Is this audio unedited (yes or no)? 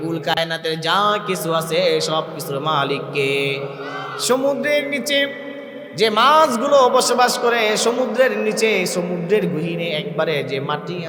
yes